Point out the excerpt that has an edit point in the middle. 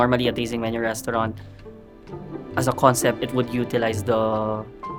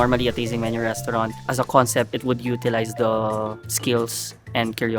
second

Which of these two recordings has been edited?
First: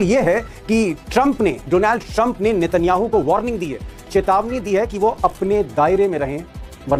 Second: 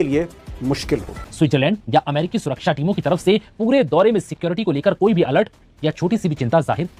second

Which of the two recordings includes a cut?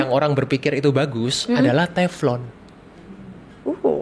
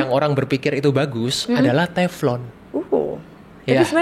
second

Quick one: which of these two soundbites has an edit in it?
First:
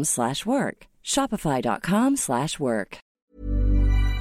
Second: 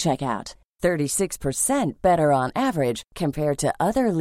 first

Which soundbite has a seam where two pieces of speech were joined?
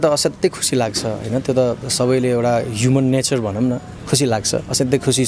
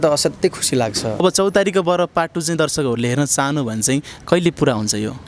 second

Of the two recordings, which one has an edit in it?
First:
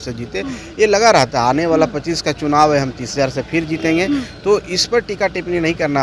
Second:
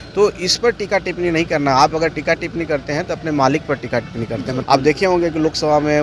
second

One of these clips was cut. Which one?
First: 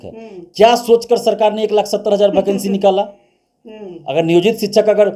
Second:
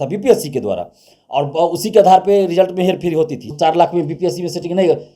second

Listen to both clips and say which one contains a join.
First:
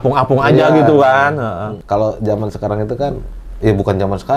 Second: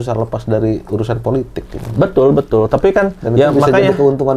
first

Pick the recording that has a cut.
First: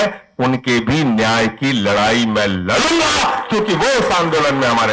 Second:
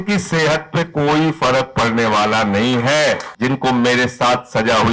second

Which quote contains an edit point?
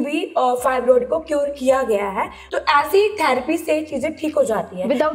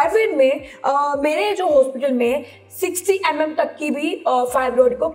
first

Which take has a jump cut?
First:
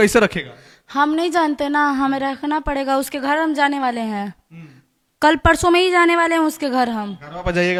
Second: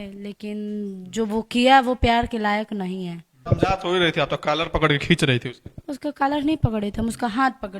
second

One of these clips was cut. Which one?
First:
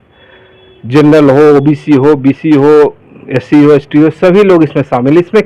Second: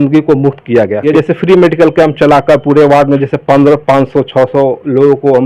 second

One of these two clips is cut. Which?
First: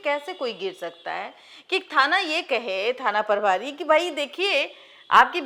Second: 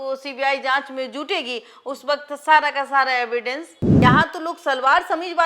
second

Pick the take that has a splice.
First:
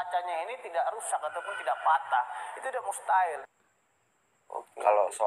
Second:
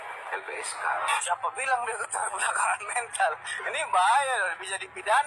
first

